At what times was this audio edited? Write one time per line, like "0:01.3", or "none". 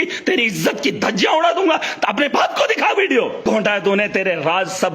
0:03.4